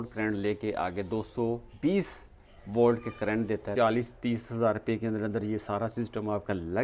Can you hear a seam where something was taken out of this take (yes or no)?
yes